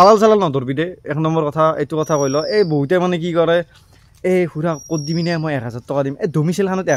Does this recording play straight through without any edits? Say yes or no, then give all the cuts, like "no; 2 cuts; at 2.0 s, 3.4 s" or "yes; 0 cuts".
yes; 0 cuts